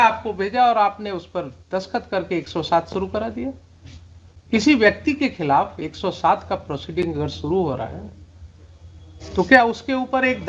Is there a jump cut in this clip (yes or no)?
no